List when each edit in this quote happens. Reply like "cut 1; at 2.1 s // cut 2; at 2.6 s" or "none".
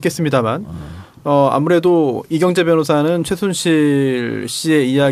cut 1; at 1.8 s